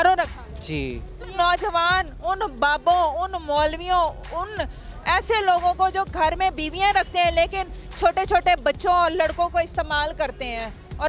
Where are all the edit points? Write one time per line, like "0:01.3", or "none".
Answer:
0:01.3